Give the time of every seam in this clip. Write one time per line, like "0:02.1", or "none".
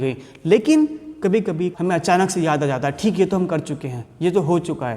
0:01.7